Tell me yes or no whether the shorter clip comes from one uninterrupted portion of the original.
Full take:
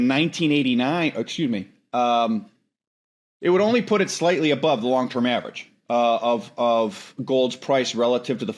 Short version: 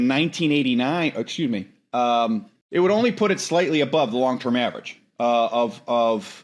no